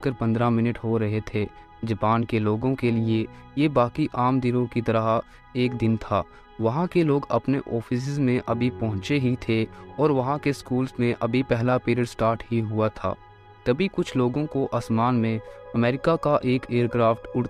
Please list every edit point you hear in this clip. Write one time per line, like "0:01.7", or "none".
none